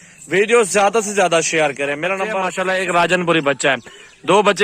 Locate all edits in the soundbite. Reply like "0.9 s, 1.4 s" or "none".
2.5 s